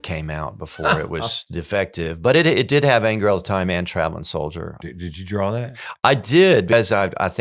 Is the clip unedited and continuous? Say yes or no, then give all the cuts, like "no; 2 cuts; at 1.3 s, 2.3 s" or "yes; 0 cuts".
no; 3 cuts; at 1.5 s, 4.8 s, 6.7 s